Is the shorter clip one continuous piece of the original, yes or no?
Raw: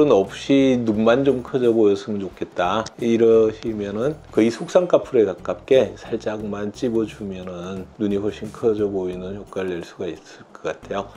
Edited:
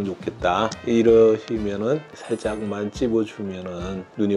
no